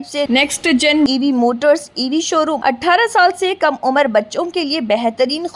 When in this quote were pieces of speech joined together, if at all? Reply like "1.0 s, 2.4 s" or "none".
2.6 s